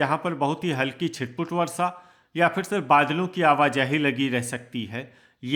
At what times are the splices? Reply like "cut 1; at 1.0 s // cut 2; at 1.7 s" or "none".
none